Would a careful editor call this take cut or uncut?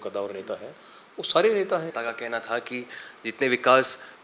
cut